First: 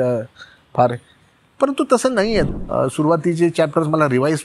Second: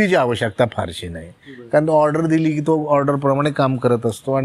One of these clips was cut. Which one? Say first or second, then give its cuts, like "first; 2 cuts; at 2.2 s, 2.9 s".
first; 1 cut; at 2.5 s